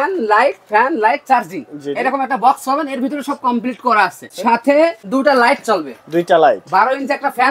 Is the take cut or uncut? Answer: uncut